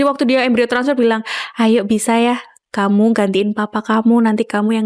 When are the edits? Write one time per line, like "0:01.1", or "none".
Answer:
none